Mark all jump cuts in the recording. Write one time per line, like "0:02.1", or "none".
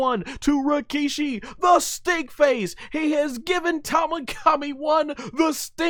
none

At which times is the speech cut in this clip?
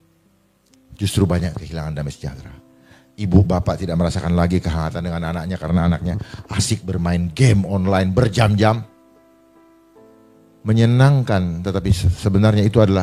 none

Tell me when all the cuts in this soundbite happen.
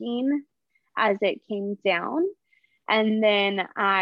none

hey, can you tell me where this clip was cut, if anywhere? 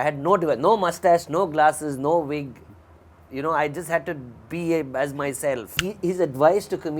0:05.8

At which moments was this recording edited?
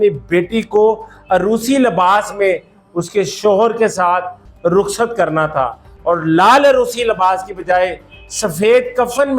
none

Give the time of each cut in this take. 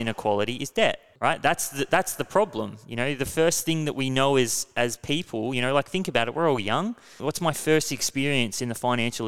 0:01.1
0:07.2

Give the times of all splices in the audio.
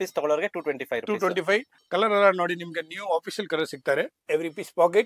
0:01.8
0:04.2

